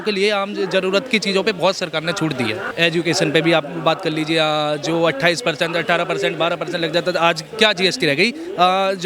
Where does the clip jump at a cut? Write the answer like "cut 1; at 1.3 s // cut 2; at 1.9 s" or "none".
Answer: none